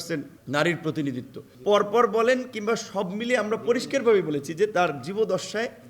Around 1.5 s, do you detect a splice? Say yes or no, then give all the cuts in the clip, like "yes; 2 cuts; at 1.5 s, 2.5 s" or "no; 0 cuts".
yes; 1 cut; at 1.5 s